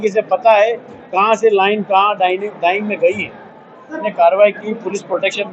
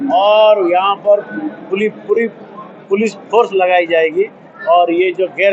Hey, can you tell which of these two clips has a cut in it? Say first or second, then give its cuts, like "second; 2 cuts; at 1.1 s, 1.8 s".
first; 1 cut; at 4.0 s